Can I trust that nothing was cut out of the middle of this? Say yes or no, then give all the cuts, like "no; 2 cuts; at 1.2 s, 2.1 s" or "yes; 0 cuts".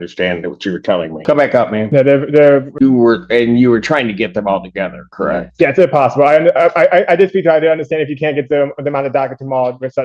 no; 3 cuts; at 1.1 s, 1.9 s, 2.7 s